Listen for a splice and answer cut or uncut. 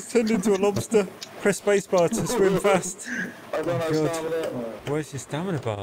uncut